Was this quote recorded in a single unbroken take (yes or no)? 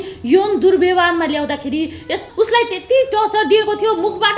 no